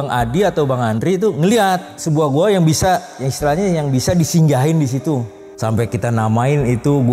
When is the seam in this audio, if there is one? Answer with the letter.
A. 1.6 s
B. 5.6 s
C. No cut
B